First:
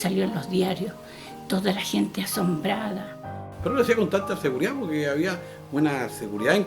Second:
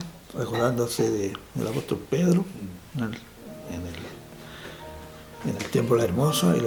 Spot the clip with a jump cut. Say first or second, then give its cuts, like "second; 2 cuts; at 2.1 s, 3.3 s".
first; 1 cut; at 3.5 s